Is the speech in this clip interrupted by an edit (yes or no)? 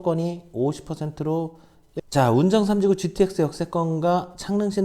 yes